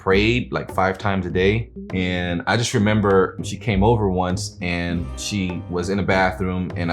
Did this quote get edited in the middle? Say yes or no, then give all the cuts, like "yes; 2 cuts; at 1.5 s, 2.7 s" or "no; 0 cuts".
yes; 3 cuts; at 1.8 s, 3.4 s, 5.2 s